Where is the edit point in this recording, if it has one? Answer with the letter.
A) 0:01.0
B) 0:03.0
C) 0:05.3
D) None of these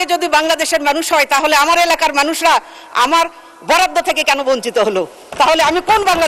D